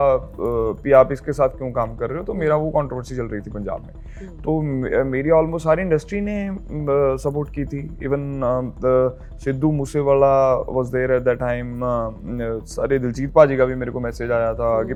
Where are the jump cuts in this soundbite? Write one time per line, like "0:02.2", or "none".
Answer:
none

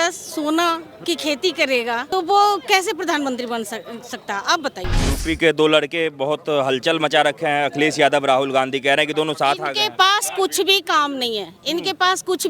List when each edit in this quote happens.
0:00.9
0:02.0
0:05.1

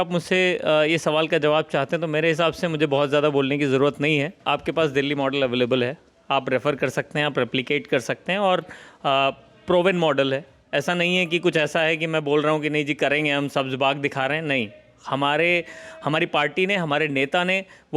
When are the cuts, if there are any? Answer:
0:04.4

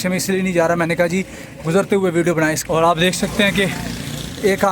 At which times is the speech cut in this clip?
0:02.6

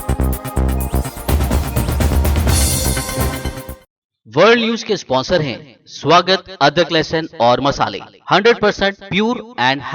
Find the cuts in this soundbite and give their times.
0:03.8

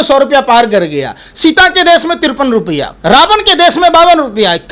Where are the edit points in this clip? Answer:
0:02.9

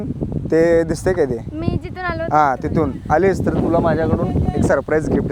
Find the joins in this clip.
none

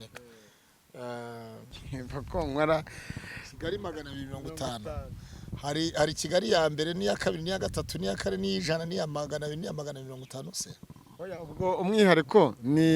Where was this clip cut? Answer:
0:01.8

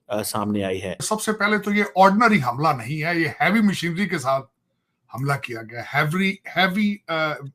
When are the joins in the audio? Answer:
0:01.1

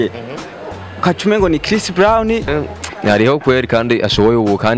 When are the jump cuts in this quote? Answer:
0:02.5

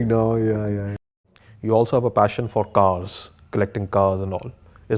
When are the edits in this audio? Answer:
0:01.1

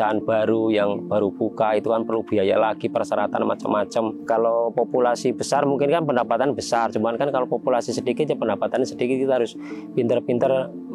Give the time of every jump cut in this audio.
0:04.2

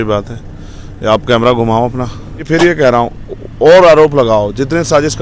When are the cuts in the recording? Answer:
0:02.4

